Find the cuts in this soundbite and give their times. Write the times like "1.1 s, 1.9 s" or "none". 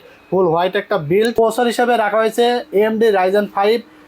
1.4 s

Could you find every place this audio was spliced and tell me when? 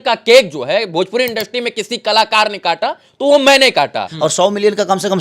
4.1 s

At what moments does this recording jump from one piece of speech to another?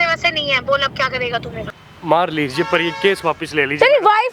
1.8 s

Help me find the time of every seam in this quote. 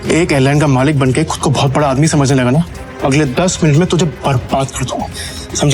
2.8 s

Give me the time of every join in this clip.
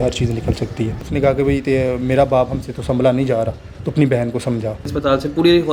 1.1 s, 4.9 s

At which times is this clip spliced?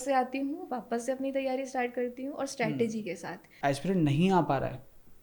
3.4 s

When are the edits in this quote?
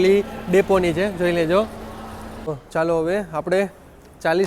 2.4 s

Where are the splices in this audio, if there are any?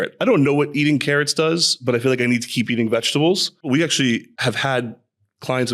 3.7 s, 4.3 s

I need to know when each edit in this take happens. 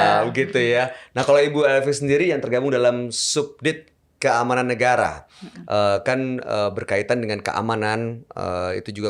none

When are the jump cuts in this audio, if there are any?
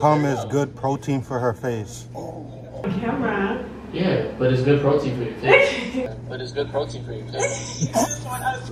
none

